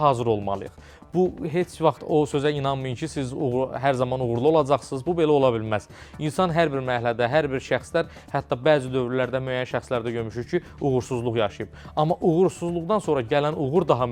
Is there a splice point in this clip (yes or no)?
no